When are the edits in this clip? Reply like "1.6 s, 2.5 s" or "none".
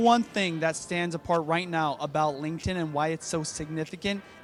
none